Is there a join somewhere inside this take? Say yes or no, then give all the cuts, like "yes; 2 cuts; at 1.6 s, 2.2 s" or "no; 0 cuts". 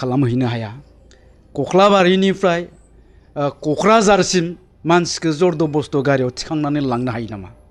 no; 0 cuts